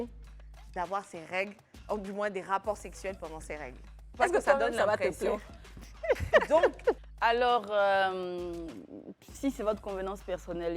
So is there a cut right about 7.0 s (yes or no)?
yes